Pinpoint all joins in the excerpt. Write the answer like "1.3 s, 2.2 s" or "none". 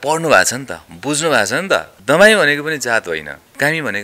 1.9 s